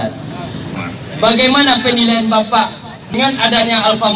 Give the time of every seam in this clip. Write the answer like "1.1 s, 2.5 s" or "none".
0.8 s, 3.1 s